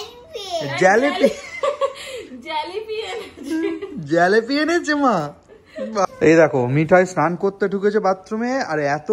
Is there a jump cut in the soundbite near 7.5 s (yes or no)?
no